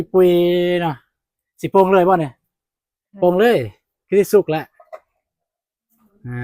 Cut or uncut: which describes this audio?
uncut